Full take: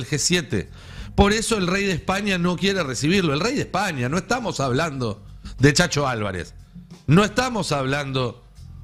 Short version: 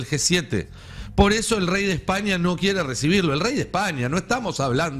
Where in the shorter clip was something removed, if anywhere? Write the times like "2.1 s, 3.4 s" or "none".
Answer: none